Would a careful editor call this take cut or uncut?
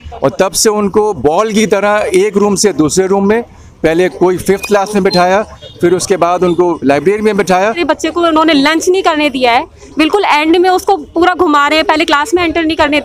cut